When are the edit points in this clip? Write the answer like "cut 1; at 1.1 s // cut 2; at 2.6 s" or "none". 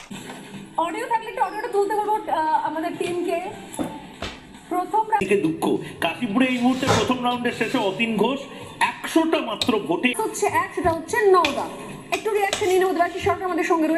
cut 1; at 5.2 s // cut 2; at 10.1 s